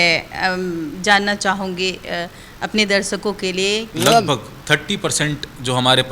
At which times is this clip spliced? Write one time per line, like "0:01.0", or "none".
0:03.9